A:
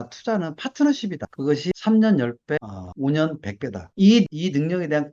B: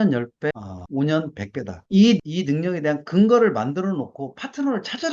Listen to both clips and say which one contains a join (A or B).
A